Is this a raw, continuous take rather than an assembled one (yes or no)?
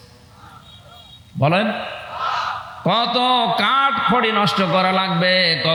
yes